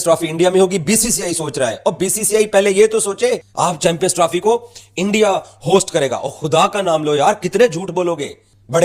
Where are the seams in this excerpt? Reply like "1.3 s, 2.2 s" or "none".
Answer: 3.5 s